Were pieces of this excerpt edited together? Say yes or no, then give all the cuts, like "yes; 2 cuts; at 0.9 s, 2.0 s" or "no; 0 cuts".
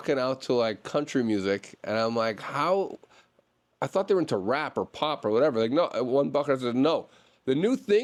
no; 0 cuts